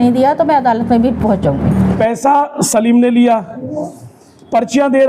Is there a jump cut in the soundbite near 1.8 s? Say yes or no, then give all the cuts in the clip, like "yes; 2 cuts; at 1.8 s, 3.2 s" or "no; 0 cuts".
yes; 1 cut; at 1.8 s